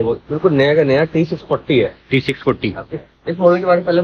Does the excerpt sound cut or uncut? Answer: uncut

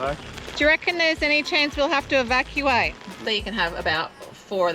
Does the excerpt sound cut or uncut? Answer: cut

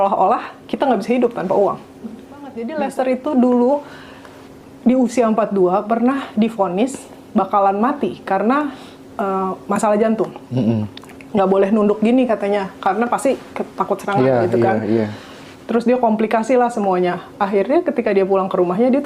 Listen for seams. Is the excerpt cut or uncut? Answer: cut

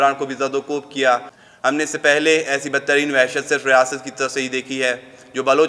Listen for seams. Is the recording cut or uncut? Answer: cut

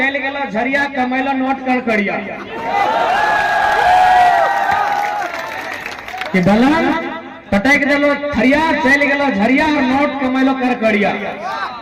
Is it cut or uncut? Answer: uncut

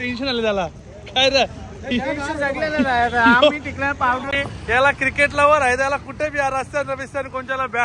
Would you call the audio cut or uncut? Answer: cut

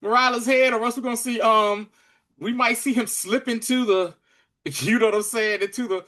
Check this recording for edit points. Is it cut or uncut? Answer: uncut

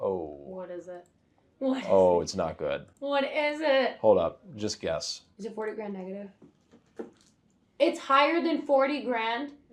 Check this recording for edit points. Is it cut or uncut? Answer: uncut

